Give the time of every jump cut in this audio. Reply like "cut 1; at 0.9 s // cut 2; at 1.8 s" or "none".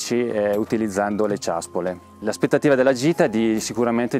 none